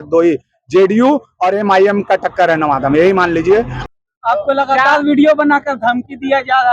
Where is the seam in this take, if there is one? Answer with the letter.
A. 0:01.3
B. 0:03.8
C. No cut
B